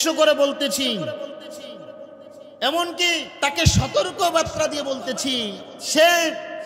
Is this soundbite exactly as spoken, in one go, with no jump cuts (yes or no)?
no